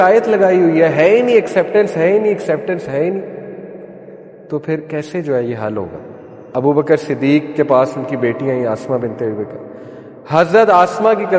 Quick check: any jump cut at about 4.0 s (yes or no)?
no